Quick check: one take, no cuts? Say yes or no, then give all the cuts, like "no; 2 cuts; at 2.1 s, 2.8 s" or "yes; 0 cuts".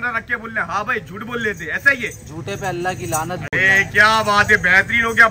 yes; 0 cuts